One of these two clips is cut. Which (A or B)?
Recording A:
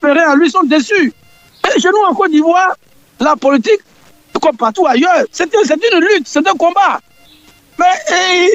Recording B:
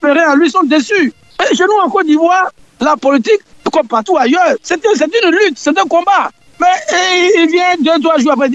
B